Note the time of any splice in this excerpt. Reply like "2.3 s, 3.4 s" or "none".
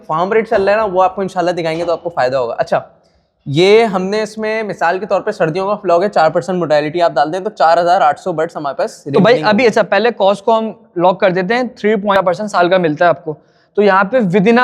12.1 s